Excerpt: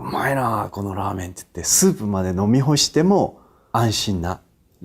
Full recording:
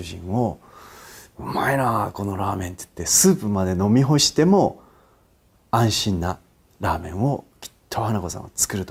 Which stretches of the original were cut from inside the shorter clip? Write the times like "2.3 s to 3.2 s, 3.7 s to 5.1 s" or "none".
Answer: 4.9 s to 5.5 s